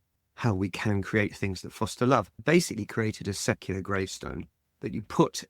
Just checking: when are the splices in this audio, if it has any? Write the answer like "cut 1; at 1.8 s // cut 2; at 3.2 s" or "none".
cut 1; at 2.4 s